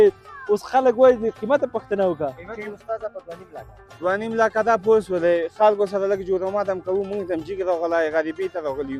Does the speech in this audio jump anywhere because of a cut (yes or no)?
no